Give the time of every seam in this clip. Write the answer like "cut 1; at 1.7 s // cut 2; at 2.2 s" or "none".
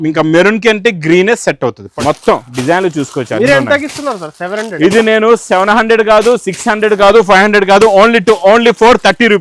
cut 1; at 1.8 s